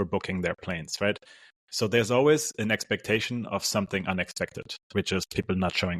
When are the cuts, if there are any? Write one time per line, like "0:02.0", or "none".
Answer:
none